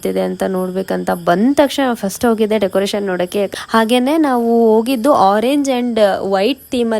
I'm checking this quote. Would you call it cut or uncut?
cut